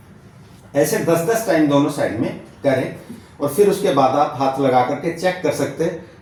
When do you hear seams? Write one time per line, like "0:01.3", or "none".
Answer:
none